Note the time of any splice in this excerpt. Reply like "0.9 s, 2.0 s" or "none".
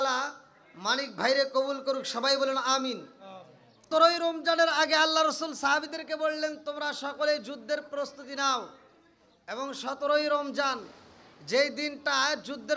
3.9 s